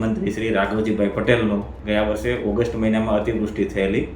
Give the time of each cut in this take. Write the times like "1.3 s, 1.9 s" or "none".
1.8 s